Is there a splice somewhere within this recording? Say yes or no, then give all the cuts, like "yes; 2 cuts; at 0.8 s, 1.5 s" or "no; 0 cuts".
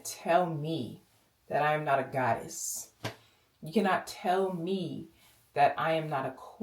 no; 0 cuts